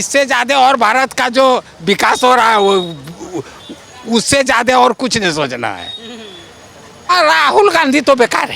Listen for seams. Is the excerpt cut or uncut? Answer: cut